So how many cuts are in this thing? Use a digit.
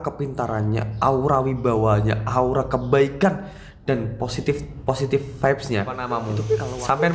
1